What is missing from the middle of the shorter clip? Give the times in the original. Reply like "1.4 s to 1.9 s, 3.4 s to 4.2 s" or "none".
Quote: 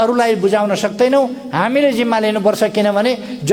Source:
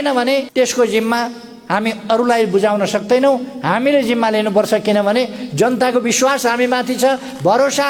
none